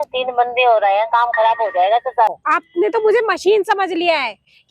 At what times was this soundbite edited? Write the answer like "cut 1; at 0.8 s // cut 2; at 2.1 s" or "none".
cut 1; at 2.3 s